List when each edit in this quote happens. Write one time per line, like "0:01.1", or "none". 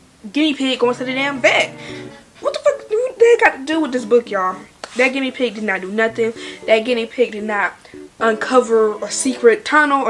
none